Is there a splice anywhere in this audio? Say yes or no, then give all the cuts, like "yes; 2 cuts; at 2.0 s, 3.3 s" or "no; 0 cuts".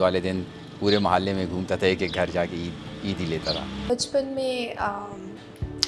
yes; 1 cut; at 3.8 s